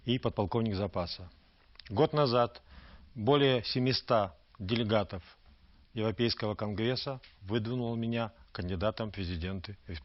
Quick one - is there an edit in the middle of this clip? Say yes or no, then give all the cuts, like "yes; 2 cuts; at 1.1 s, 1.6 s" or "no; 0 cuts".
no; 0 cuts